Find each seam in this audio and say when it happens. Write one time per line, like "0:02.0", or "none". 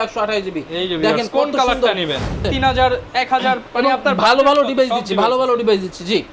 0:02.5